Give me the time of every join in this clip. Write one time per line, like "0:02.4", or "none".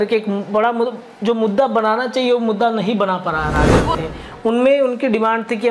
0:04.0